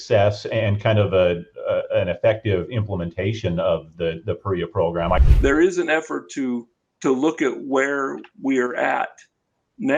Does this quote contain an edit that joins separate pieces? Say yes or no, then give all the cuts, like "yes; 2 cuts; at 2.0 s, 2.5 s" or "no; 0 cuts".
yes; 1 cut; at 5.2 s